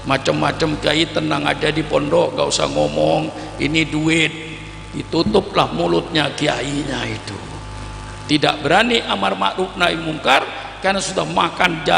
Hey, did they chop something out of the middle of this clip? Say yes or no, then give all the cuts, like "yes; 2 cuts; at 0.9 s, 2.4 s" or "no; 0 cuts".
no; 0 cuts